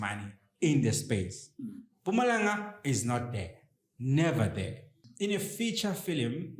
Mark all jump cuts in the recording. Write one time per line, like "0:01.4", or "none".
0:05.0